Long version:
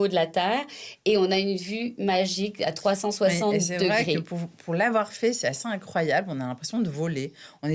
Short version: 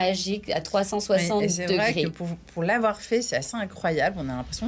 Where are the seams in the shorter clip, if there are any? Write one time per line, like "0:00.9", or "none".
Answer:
none